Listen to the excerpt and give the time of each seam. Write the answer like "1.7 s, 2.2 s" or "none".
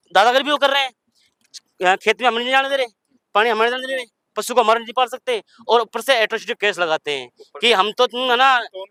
none